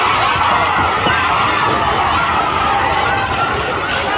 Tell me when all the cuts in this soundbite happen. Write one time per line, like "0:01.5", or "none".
none

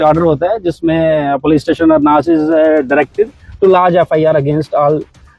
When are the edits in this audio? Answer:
none

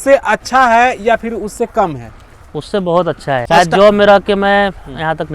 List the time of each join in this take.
0:03.4

